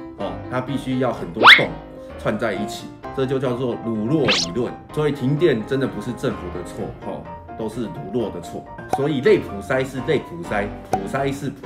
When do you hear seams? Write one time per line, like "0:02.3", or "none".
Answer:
0:03.0
0:08.8